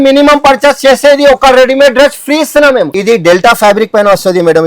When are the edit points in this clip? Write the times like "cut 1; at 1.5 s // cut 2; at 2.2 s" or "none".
cut 1; at 2.9 s

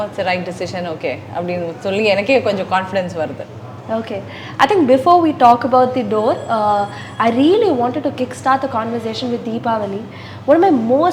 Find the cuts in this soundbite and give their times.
none

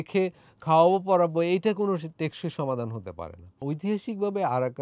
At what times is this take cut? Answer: cut 1; at 3.6 s

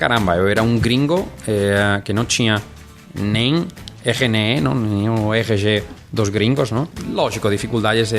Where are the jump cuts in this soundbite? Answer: cut 1; at 7.0 s

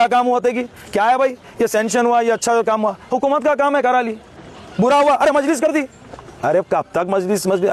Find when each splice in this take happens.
none

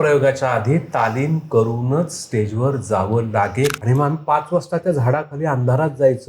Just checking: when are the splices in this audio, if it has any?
cut 1; at 3.8 s

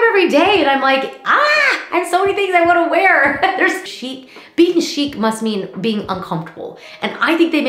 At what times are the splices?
cut 1; at 3.9 s

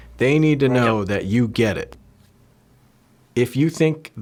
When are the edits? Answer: none

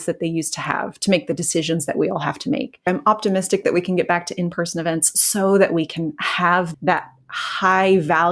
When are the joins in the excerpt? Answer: cut 1; at 2.8 s // cut 2; at 6.7 s

